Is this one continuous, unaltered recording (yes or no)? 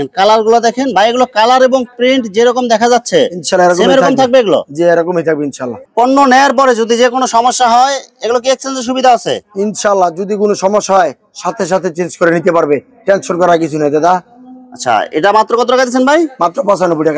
yes